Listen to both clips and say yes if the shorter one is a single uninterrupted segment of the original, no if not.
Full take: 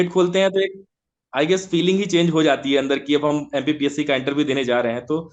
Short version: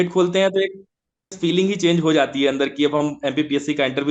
no